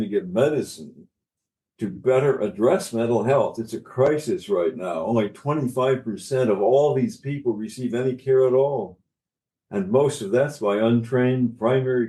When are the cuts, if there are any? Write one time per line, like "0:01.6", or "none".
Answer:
none